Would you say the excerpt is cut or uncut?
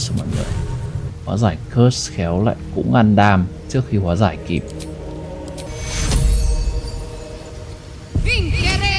cut